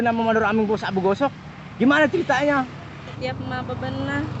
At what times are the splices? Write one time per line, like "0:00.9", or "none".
0:03.2